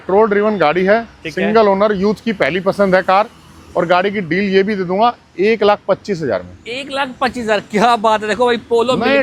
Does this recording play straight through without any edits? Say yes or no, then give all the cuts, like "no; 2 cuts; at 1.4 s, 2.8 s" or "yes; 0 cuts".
yes; 0 cuts